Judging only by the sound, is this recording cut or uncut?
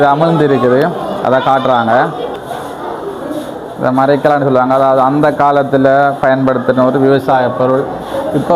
cut